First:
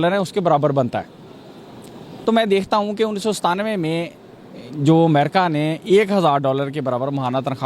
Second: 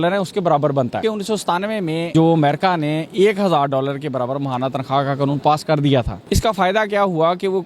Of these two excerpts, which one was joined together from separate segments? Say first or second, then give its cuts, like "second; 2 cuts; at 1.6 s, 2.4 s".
second; 3 cuts; at 1.0 s, 2.1 s, 6.2 s